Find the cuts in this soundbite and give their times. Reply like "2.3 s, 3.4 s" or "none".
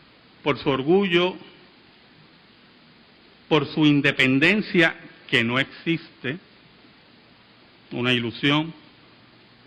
none